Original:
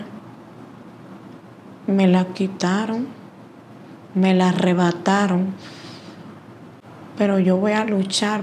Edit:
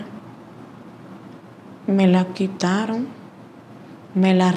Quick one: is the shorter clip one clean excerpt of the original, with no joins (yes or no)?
yes